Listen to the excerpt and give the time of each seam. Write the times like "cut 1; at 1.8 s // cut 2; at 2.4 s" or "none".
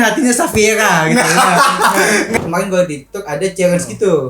cut 1; at 2.3 s